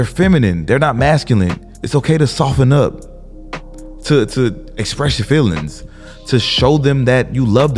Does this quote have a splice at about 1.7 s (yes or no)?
yes